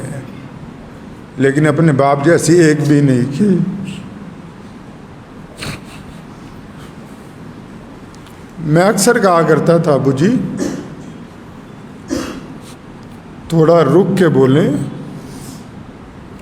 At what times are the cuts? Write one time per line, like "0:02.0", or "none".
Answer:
none